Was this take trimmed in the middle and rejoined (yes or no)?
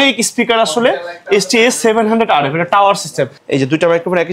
yes